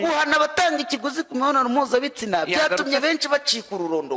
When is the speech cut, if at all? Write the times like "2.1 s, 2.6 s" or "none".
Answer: none